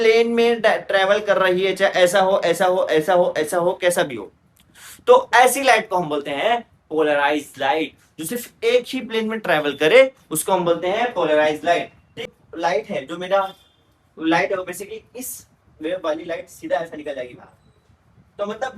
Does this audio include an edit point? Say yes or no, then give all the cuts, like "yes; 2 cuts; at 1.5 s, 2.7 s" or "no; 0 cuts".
yes; 1 cut; at 12.2 s